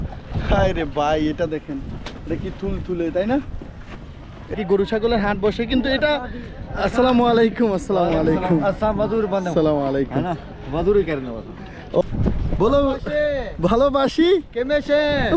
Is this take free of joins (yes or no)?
no